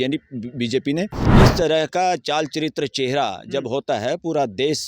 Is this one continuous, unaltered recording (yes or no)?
no